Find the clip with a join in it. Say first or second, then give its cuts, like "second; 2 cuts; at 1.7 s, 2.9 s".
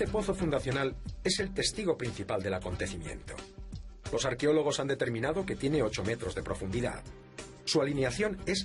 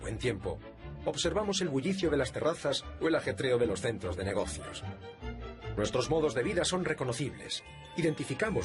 second; 1 cut; at 2.8 s